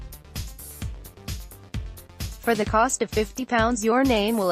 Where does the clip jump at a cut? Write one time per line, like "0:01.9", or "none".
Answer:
0:02.3